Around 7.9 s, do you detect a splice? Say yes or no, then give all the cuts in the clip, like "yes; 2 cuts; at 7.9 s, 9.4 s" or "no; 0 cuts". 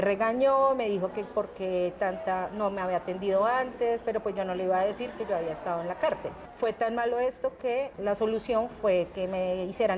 yes; 2 cuts; at 6.4 s, 7.9 s